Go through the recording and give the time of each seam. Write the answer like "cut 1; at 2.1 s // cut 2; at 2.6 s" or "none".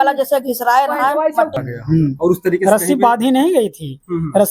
cut 1; at 1.5 s